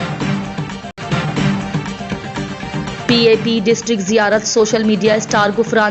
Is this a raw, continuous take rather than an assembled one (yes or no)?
no